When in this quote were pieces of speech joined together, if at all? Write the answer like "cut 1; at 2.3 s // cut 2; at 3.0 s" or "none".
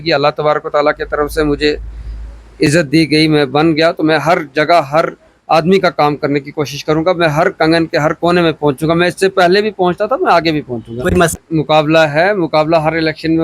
cut 1; at 11.3 s